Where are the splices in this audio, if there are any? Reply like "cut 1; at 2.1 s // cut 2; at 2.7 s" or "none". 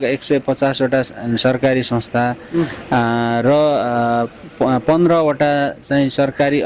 none